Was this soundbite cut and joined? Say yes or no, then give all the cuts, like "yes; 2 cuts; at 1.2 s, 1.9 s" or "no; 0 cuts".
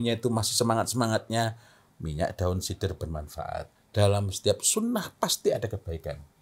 yes; 1 cut; at 3.7 s